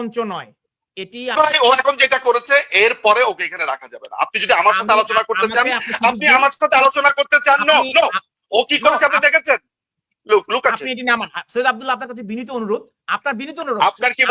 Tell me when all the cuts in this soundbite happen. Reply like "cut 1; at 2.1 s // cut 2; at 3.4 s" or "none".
cut 1; at 1.3 s